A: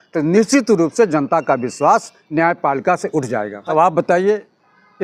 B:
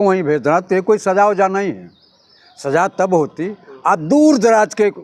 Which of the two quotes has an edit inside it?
A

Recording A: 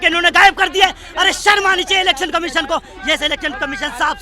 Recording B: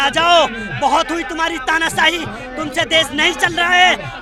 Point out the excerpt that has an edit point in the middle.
A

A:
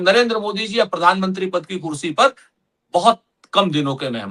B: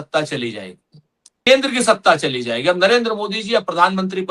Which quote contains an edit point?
B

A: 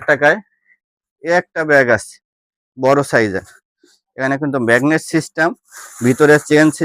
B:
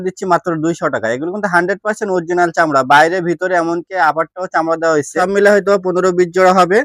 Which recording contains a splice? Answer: B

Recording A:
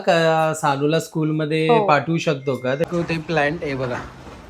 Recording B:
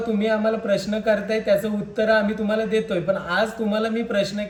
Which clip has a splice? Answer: A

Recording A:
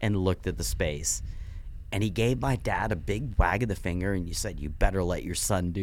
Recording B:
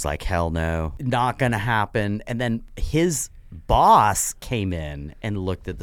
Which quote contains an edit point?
B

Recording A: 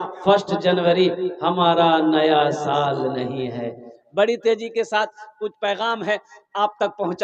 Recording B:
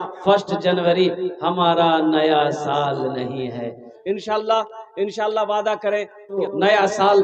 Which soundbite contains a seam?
B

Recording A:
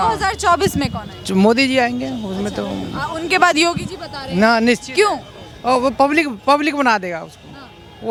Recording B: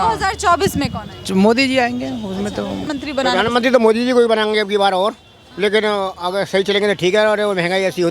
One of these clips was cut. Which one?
B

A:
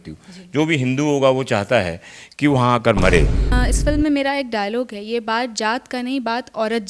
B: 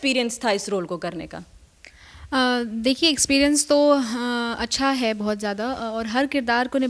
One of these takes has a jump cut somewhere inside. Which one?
A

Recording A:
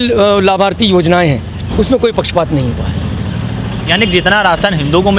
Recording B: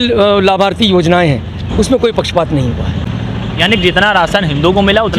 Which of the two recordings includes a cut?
B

